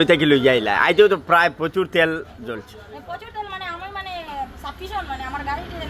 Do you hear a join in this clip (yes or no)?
no